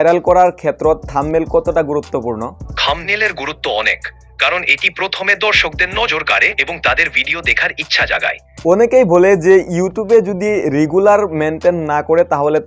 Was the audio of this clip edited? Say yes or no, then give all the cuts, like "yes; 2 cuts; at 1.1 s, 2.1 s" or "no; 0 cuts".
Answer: yes; 2 cuts; at 2.7 s, 8.5 s